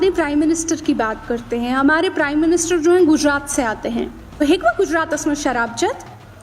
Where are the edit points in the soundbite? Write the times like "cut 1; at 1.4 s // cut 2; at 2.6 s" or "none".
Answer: cut 1; at 4.4 s